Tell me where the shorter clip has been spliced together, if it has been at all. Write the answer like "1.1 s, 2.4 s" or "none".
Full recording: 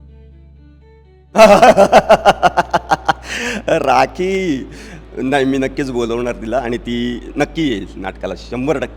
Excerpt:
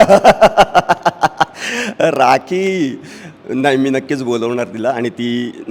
none